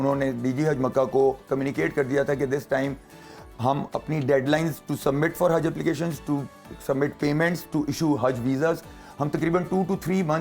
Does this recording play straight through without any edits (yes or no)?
yes